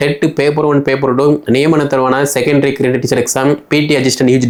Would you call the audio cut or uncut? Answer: uncut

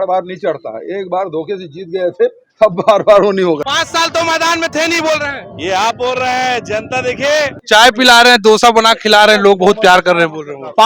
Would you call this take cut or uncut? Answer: cut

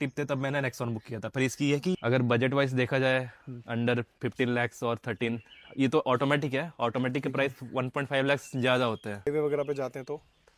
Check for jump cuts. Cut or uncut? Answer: cut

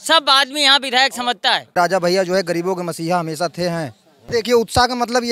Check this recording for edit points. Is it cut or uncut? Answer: cut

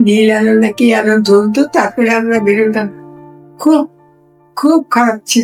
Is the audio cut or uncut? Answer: uncut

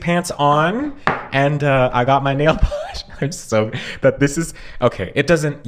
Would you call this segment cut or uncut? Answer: uncut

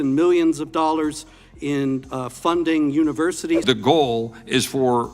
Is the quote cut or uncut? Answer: cut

